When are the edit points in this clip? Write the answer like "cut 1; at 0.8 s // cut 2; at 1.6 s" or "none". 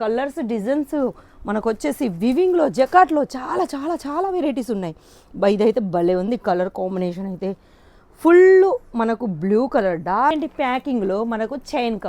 cut 1; at 10.3 s